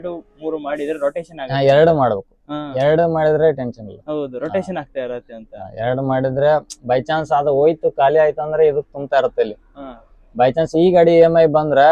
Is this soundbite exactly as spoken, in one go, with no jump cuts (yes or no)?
yes